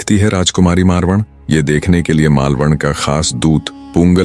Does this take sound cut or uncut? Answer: uncut